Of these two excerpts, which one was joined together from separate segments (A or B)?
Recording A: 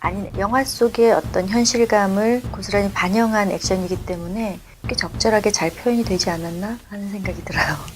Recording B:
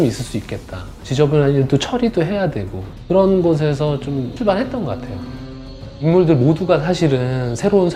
A